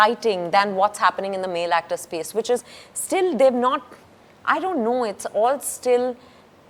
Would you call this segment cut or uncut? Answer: uncut